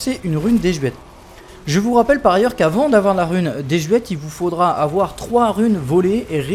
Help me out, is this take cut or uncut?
uncut